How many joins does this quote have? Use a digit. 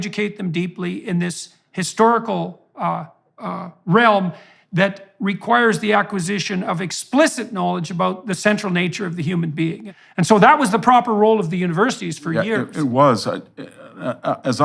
1